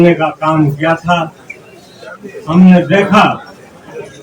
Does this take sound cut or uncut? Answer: uncut